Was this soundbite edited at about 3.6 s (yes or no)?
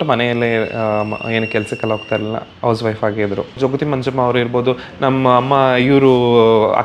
yes